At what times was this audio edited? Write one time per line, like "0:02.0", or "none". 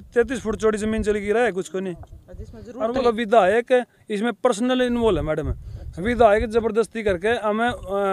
0:02.9